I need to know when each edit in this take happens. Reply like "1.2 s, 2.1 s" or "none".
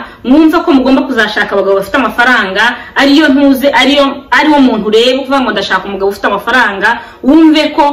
none